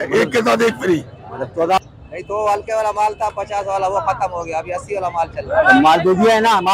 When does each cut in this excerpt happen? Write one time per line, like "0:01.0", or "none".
0:01.8